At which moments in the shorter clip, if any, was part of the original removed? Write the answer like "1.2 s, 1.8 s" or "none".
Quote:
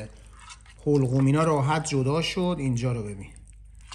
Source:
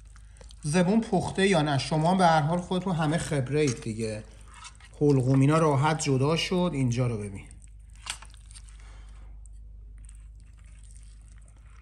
none